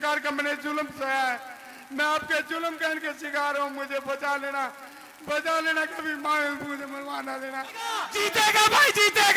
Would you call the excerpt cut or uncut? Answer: cut